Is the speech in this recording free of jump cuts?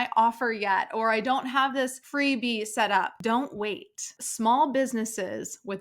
no; 3 cuts; at 2.0 s, 3.2 s, 4.2 s

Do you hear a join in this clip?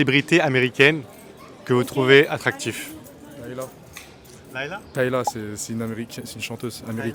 no; 0 cuts

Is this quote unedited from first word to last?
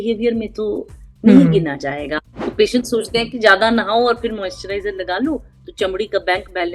no; 1 cut; at 2.4 s

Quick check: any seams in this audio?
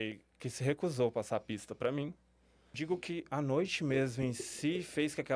yes; 1 cut; at 2.7 s

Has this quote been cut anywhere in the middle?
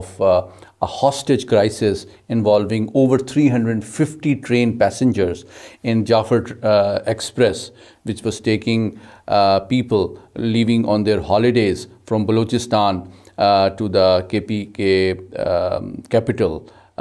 no; 0 cuts

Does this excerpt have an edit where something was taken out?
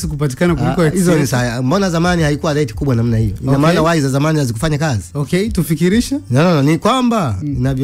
no; 0 cuts

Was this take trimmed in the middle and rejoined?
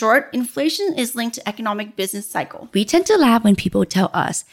yes; 1 cut; at 2.6 s

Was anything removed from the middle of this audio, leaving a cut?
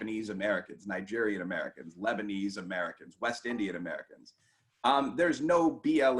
no; 0 cuts

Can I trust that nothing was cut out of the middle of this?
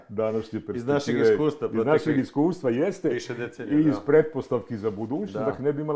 yes; 0 cuts

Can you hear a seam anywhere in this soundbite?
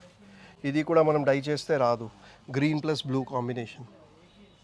no; 0 cuts

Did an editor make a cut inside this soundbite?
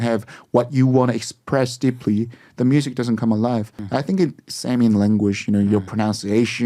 no; 0 cuts

